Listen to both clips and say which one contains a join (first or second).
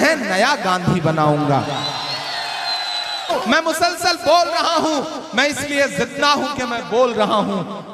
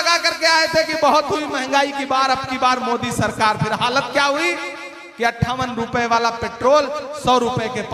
first